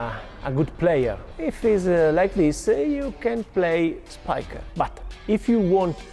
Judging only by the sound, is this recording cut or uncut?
cut